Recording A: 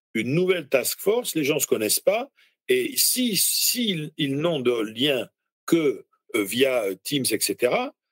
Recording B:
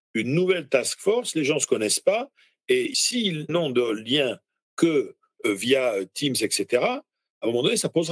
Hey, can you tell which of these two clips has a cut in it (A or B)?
B